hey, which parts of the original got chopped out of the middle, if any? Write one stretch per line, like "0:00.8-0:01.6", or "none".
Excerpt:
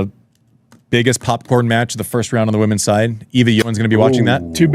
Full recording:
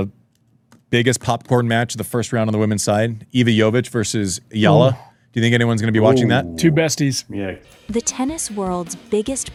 0:03.6-0:05.7